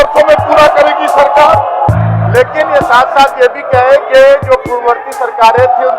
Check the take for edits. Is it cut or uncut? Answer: cut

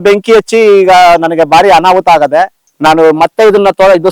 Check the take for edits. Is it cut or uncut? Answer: uncut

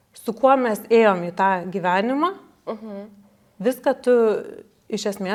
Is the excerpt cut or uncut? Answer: uncut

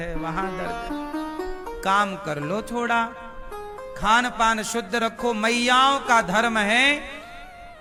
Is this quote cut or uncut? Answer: uncut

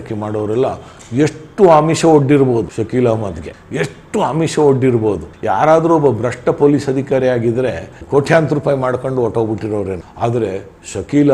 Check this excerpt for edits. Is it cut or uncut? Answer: uncut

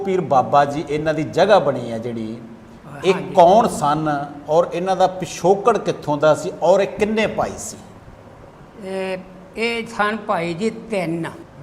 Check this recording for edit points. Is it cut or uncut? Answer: uncut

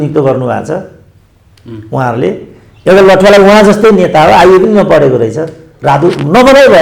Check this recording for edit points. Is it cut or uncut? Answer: uncut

